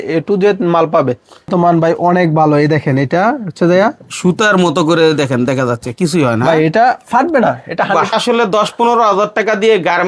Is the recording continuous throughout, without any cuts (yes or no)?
no